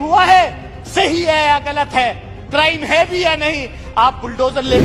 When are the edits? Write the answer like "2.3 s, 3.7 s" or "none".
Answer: none

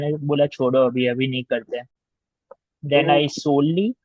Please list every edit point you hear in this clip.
none

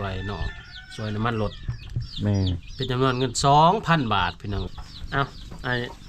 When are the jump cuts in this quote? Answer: 4.7 s

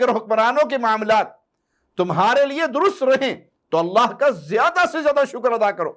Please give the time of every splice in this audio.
none

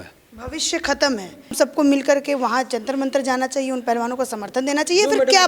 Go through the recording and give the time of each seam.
1.6 s

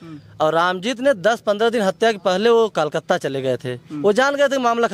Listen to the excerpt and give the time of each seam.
none

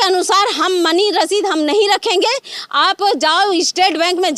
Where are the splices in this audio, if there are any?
none

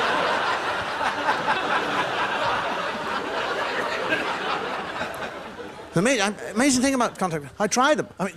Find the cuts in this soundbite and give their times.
none

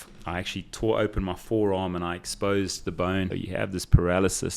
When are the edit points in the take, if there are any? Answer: 3.3 s

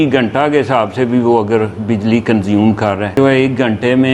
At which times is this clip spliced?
3.1 s

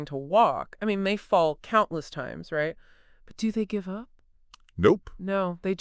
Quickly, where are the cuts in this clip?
none

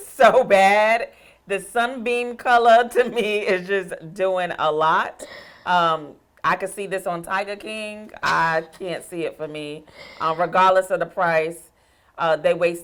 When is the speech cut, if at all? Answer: none

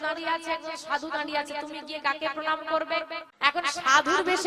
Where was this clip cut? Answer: 3.2 s

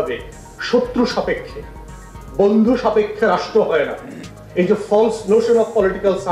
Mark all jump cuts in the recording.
none

